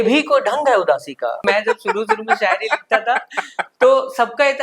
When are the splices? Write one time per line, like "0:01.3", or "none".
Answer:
0:01.4